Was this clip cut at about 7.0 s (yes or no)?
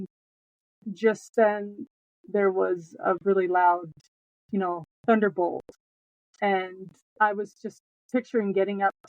yes